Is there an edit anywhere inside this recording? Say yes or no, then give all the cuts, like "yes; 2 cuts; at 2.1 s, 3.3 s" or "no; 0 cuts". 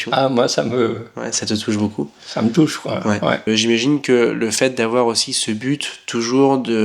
yes; 1 cut; at 3.4 s